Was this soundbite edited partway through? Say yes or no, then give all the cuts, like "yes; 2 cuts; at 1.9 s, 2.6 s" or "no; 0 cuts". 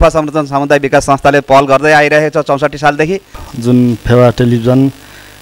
yes; 1 cut; at 3.4 s